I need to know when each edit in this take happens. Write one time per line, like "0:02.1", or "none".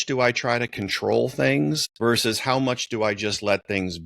0:01.9